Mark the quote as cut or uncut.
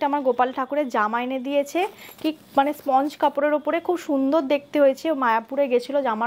uncut